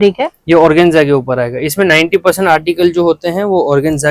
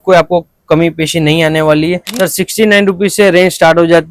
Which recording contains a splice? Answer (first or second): second